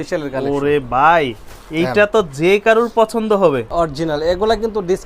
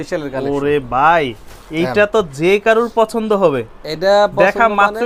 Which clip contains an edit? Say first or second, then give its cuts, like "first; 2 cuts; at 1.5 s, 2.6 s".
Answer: first; 1 cut; at 3.7 s